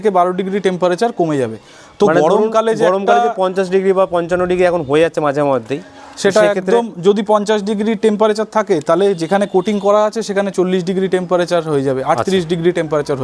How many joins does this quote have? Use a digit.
0